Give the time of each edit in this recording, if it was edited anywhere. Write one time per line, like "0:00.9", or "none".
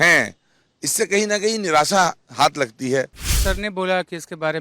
0:03.2